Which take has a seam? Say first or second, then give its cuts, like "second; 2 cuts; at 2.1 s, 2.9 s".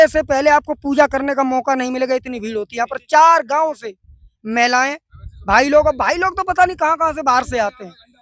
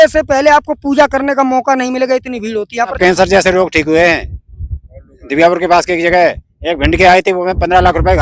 second; 1 cut; at 3.0 s